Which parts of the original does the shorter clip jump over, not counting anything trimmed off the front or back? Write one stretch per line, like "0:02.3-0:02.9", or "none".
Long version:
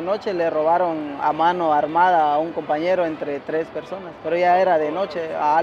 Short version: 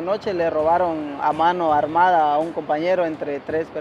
none

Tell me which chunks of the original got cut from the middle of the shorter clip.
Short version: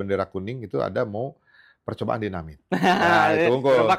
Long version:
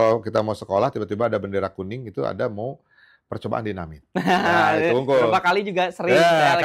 none

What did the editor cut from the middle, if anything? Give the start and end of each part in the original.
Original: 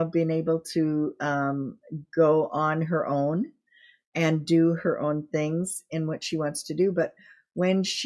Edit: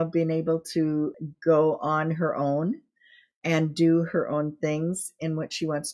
0:01.2-0:01.9

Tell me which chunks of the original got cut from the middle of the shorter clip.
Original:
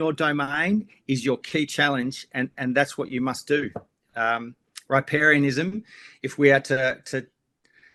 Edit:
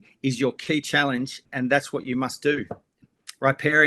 0:02.3-0:02.5
0:04.1-0:04.5

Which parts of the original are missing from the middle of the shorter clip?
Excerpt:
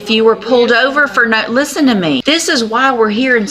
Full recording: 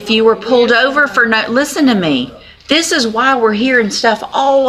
0:02.2-0:02.6

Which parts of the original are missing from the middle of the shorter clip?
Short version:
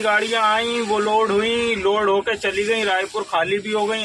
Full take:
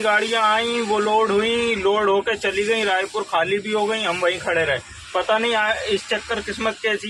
none

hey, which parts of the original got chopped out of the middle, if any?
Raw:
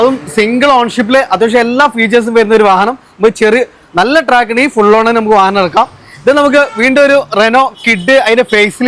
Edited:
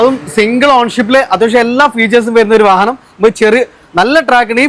none

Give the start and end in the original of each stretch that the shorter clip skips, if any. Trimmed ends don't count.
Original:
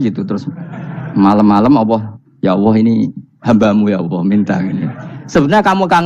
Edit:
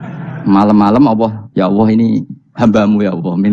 0:02.1-0:02.3

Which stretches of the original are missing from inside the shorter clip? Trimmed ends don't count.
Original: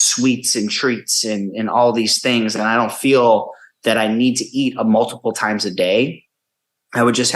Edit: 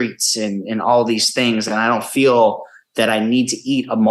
none

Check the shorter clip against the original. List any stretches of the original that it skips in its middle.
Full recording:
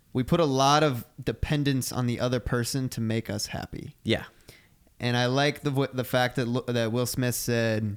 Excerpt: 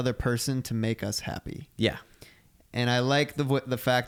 none

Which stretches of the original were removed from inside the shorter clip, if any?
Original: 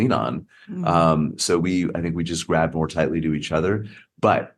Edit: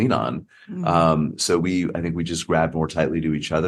none

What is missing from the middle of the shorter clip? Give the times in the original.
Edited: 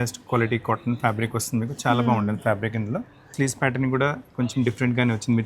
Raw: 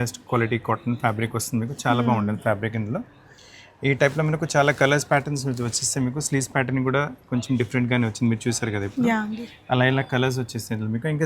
0:03.3-0:06.2

